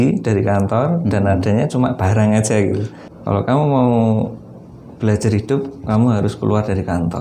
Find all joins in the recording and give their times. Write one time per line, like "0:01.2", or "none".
0:02.9